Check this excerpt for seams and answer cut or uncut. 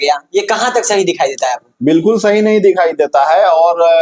uncut